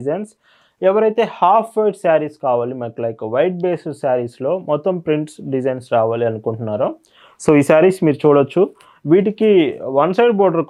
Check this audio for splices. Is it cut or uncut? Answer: uncut